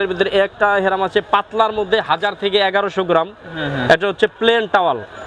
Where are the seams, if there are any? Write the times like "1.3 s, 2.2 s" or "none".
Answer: none